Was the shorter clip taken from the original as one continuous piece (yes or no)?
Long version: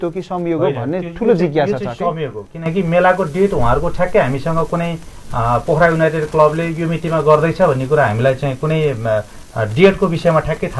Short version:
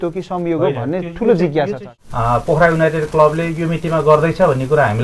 no